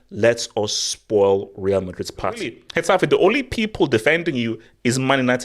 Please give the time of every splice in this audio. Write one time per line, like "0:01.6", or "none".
0:02.7